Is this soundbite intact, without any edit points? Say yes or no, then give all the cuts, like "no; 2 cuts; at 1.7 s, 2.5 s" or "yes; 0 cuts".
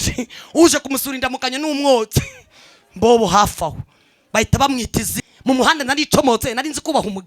no; 1 cut; at 5.2 s